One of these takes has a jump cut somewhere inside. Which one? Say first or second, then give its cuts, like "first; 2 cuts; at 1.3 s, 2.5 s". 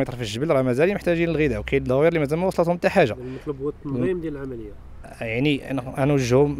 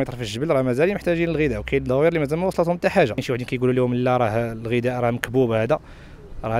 second; 1 cut; at 3.2 s